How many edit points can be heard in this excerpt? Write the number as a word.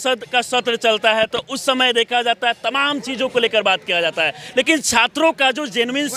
zero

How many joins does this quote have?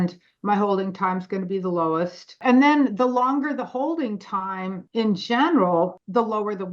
three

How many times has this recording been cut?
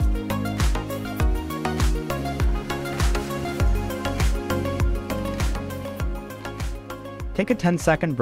one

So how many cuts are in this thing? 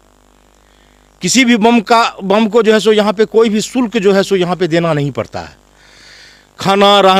zero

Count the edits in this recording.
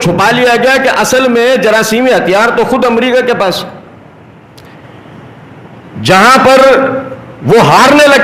zero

